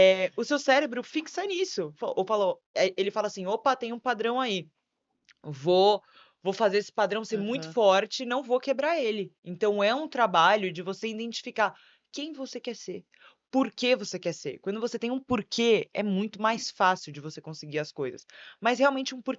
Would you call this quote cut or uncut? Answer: uncut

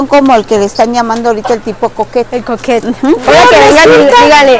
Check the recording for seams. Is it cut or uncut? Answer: cut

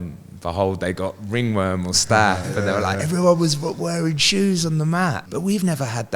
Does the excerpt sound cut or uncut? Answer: cut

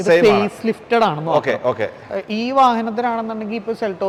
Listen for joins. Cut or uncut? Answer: uncut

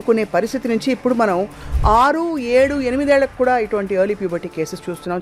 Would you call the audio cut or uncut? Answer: uncut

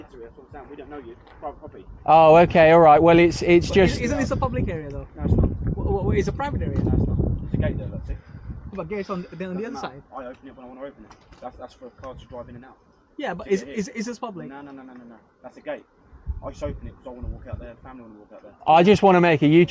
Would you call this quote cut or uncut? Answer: uncut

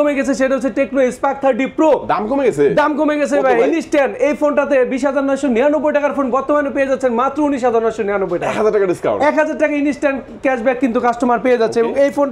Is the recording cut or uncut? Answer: uncut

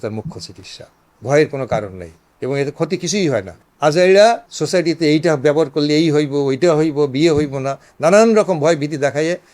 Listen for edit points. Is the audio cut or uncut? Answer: cut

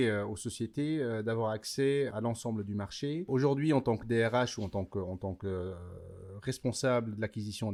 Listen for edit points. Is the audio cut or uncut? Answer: uncut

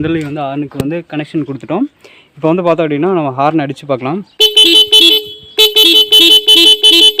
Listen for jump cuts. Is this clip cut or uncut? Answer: uncut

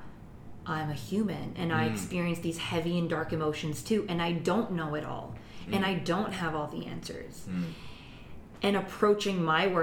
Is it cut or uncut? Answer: uncut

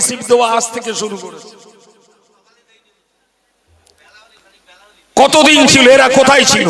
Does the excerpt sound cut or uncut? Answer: uncut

